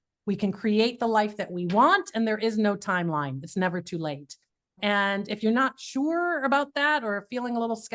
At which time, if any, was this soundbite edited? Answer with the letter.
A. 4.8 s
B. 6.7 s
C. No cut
A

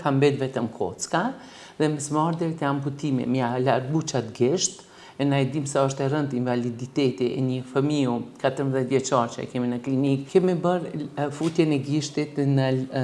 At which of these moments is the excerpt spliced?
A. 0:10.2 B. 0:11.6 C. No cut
A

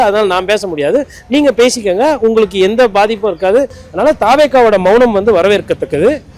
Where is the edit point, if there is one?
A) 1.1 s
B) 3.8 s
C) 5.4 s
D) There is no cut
B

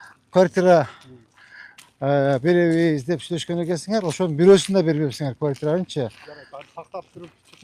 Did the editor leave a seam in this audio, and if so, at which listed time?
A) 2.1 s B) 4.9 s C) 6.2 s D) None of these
D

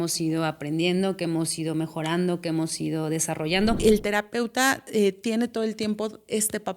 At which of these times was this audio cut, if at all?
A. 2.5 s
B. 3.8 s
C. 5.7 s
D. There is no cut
B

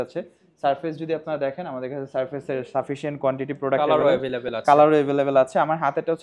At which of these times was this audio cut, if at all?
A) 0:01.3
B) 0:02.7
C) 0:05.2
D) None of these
D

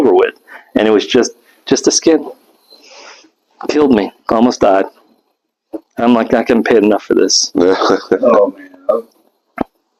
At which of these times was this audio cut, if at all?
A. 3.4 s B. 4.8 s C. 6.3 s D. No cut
D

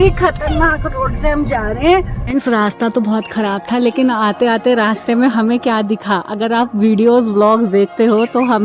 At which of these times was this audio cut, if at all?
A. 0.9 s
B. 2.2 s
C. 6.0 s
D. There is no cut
B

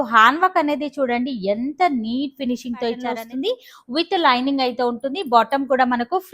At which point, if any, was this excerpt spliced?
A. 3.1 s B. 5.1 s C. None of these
A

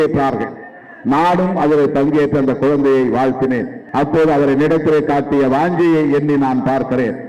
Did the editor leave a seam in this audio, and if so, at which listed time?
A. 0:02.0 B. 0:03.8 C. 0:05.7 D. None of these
B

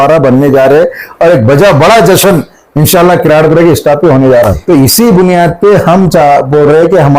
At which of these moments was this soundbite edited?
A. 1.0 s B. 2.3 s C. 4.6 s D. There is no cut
C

